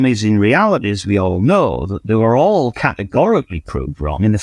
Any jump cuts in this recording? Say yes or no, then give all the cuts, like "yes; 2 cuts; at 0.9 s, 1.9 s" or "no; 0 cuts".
no; 0 cuts